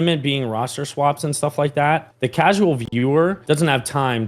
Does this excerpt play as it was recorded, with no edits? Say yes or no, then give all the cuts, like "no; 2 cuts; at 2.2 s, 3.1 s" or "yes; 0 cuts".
no; 2 cuts; at 2.1 s, 3.4 s